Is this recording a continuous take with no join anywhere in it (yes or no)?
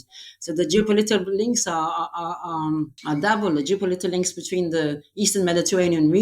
no